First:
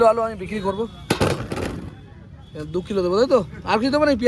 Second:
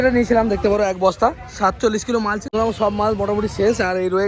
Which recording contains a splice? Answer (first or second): second